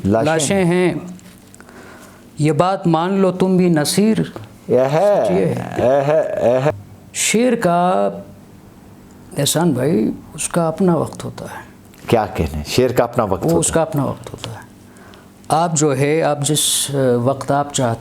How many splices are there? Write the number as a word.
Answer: one